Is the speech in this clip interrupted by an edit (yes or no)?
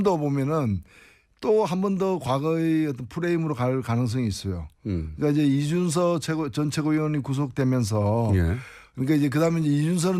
no